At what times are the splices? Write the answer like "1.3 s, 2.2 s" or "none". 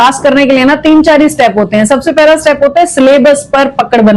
none

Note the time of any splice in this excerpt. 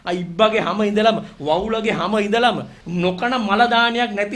2.8 s

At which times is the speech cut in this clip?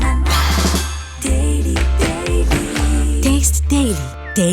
none

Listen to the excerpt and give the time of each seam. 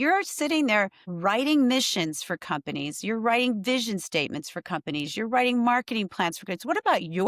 1.0 s

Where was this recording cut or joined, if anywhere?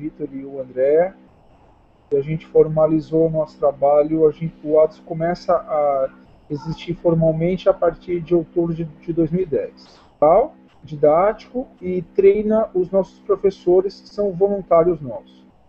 none

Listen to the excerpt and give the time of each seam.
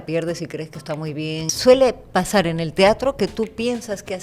1.5 s

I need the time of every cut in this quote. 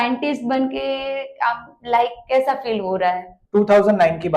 3.3 s

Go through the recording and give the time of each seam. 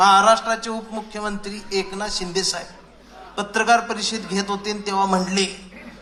none

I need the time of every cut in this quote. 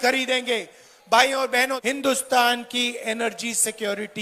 1.8 s

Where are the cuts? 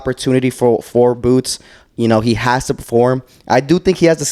none

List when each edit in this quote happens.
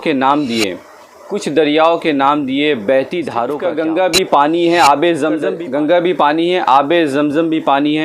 3.6 s, 5.5 s

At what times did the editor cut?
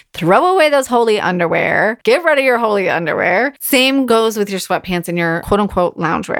2.0 s, 4.0 s, 5.4 s

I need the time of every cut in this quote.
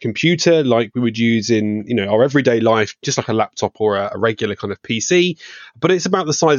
none

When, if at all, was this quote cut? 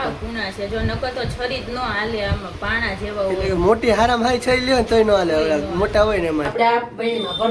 6.5 s

